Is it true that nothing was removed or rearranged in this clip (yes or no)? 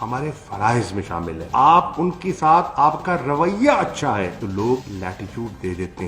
no